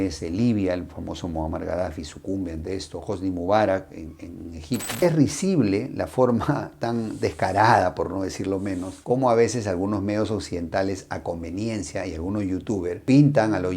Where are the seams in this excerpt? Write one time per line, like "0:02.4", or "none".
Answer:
0:04.9